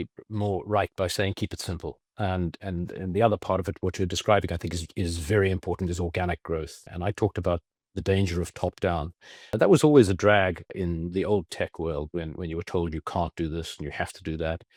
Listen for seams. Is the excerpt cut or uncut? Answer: uncut